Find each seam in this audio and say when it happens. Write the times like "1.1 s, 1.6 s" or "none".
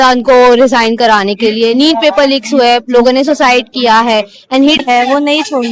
4.8 s